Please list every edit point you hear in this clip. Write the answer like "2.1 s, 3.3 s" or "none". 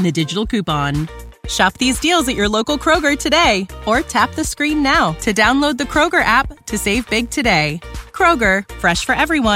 none